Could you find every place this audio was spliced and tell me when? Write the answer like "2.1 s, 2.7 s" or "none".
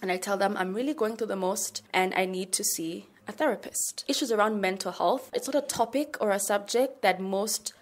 1.7 s, 4.0 s, 5.3 s